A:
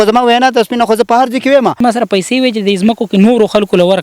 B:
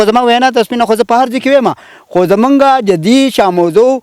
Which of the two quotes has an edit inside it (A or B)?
A